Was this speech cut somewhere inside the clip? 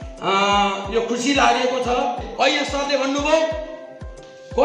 yes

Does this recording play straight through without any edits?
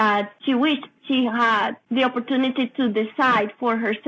no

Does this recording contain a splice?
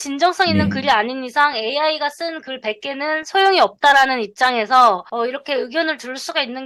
no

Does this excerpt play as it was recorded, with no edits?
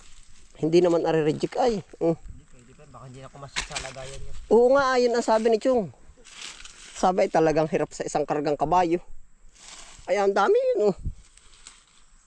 yes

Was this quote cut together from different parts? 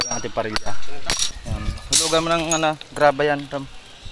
yes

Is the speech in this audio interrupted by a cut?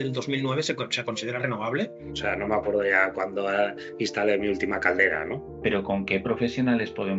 yes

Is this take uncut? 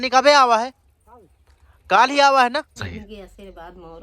no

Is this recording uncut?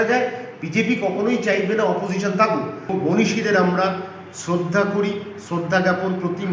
no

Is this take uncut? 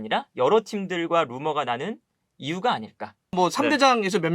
no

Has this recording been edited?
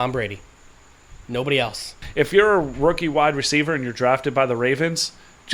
yes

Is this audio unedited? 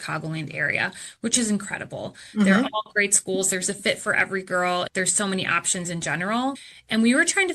no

